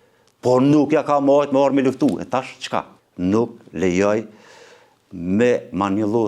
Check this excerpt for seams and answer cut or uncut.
cut